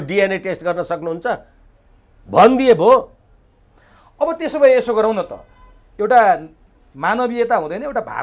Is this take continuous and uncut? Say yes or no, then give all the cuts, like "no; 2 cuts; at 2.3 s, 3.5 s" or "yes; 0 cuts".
yes; 0 cuts